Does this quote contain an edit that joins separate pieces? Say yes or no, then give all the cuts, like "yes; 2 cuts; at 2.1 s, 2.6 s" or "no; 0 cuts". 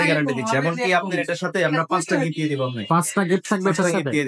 no; 0 cuts